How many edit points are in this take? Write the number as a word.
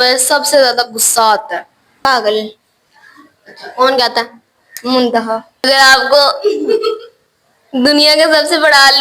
two